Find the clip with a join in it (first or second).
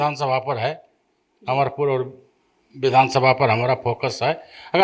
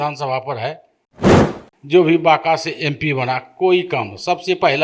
second